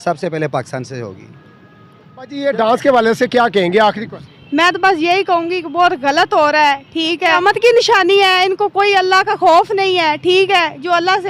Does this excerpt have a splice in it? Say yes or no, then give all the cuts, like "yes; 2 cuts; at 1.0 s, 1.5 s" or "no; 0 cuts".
yes; 2 cuts; at 2.4 s, 7.3 s